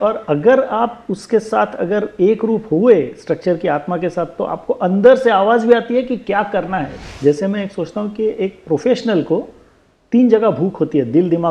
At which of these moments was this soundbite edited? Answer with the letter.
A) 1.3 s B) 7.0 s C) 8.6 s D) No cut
B